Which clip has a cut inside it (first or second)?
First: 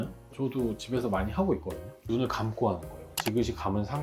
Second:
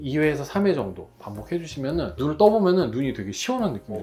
first